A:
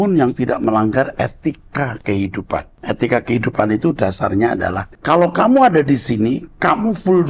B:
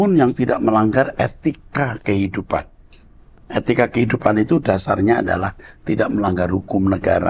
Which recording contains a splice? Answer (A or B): A